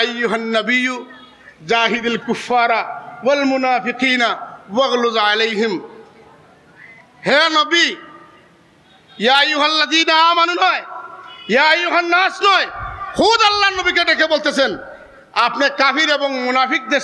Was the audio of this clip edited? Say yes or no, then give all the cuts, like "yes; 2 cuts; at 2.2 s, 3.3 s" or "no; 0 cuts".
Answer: no; 0 cuts